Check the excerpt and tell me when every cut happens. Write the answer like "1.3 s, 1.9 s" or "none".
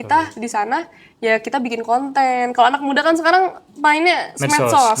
none